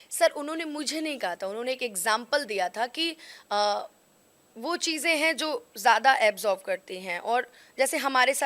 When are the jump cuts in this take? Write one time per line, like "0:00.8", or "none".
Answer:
0:04.8